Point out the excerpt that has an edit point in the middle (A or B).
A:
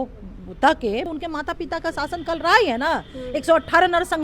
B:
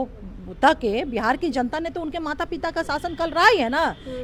A